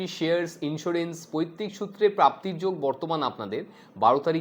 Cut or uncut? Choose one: uncut